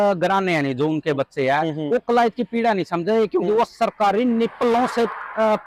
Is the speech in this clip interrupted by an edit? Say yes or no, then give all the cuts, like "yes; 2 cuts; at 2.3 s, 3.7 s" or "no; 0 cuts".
no; 0 cuts